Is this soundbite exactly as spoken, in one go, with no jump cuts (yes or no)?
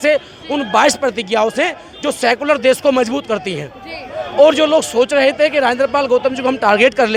yes